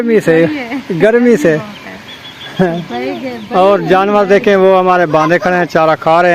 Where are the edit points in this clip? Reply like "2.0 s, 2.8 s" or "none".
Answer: none